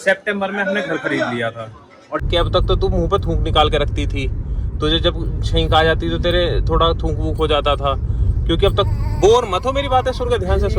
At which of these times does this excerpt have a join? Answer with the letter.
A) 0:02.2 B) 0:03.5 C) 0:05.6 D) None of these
A